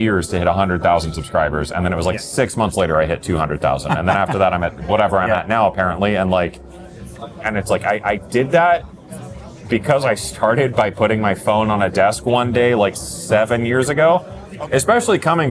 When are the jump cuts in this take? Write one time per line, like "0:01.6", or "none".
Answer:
0:06.5
0:14.4

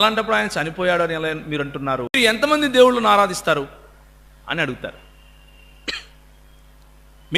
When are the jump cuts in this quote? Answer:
0:02.2

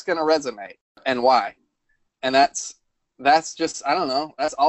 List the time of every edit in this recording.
0:01.0

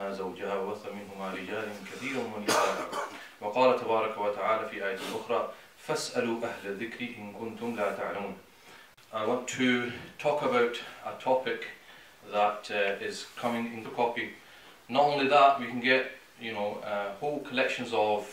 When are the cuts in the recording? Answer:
none

